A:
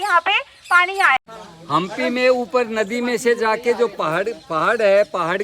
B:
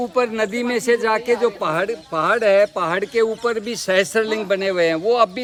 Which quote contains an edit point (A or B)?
A